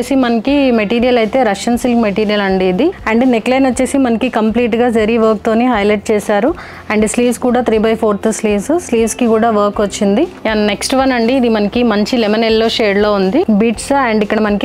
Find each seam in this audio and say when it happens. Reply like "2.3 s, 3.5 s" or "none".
3.0 s, 10.4 s, 13.5 s